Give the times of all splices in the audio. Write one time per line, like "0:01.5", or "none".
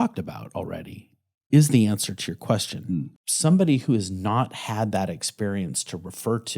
0:03.2